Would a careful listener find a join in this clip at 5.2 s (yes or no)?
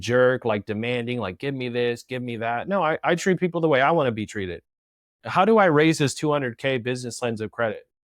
yes